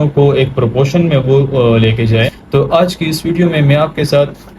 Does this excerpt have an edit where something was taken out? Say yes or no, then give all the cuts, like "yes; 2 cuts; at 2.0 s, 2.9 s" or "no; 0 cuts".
yes; 1 cut; at 2.2 s